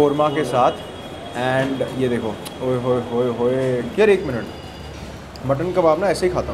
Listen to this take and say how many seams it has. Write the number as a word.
one